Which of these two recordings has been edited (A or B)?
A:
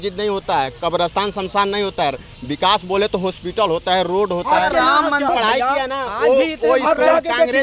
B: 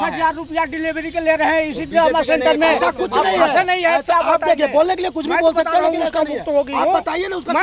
A